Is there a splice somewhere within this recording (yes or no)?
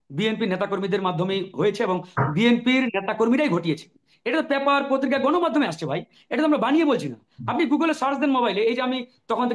no